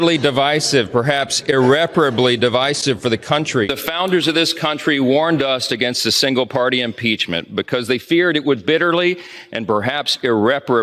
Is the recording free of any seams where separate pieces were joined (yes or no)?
yes